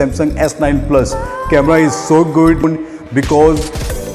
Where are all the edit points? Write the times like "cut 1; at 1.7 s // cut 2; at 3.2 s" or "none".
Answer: cut 1; at 2.6 s